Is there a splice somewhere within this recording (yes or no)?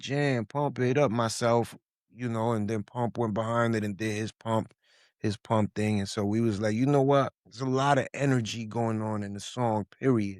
no